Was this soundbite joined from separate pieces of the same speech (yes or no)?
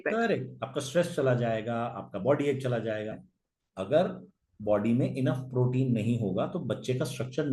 yes